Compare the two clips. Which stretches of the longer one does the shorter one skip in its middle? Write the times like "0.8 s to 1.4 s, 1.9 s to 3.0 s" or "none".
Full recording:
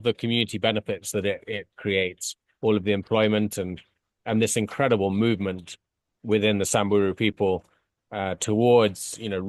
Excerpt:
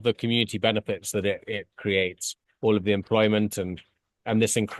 none

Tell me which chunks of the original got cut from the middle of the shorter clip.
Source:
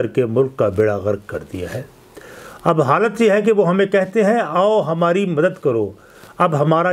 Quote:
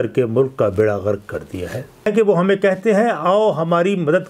2.1 s to 3.4 s

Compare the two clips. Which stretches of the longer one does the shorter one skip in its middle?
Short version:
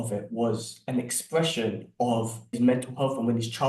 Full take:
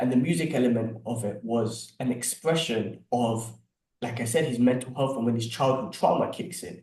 3.6 s to 4.5 s

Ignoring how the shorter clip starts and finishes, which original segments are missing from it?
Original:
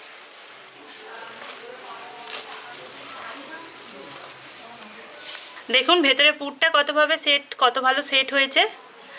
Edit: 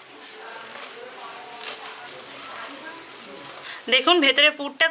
4.4 s to 5.5 s

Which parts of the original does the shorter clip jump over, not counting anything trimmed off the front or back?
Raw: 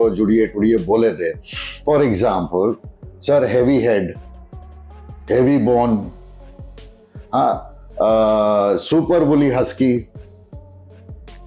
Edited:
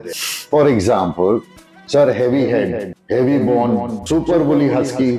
4.2 s to 5.1 s, 6.2 s to 8.8 s

